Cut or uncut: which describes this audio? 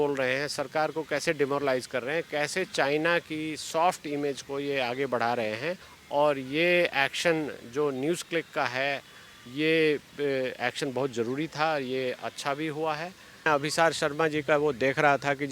cut